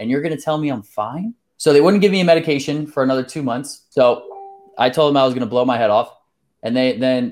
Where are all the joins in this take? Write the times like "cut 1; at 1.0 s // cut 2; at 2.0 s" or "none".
cut 1; at 1.4 s // cut 2; at 3.7 s